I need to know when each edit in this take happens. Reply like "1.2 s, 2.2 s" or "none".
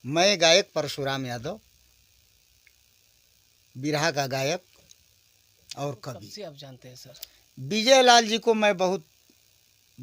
6.3 s